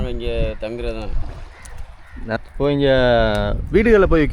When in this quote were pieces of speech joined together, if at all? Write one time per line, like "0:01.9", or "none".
0:02.4